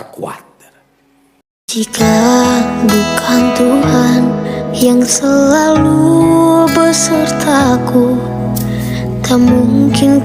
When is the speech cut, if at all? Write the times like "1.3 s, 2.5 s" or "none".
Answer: 1.4 s